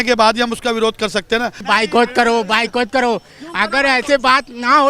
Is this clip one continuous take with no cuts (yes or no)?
no